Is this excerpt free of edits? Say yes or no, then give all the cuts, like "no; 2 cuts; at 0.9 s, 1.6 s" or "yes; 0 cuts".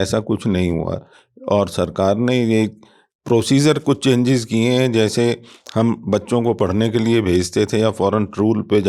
yes; 0 cuts